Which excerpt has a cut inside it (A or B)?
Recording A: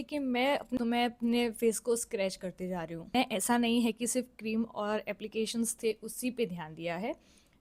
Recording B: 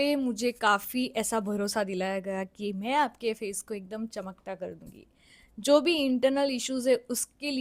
A